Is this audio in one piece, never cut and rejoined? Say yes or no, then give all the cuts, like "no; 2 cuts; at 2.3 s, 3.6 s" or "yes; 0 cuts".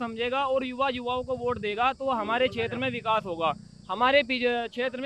yes; 0 cuts